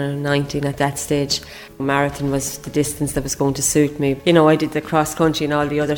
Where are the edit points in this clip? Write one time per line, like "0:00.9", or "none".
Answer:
0:01.8
0:04.2